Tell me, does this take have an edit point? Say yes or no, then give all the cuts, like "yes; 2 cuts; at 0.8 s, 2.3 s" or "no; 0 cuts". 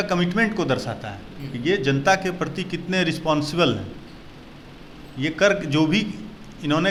no; 0 cuts